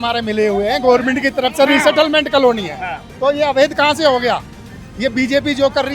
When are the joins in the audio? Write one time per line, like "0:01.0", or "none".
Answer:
0:03.0